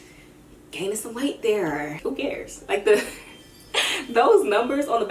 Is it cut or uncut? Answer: cut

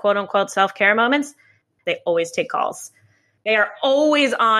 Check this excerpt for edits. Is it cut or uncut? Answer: cut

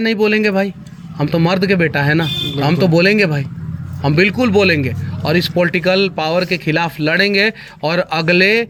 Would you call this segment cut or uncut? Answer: uncut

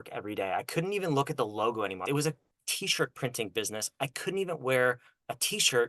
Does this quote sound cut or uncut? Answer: cut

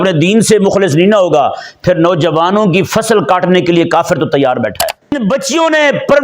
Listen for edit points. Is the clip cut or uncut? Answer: cut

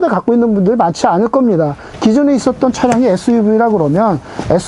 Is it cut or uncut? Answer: cut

